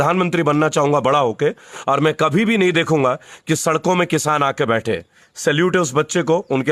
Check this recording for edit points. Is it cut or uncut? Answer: uncut